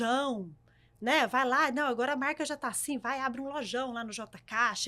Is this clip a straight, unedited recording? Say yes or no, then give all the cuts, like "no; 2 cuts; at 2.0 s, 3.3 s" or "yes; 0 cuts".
yes; 0 cuts